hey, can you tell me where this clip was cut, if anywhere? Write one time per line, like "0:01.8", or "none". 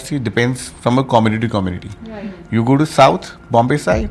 none